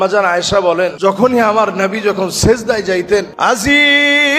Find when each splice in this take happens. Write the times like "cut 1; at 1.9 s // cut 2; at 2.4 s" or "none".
cut 1; at 0.9 s // cut 2; at 3.3 s